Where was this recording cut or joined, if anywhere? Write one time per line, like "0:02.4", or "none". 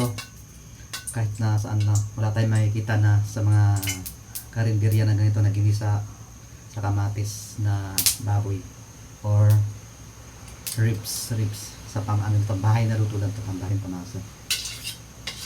0:13.7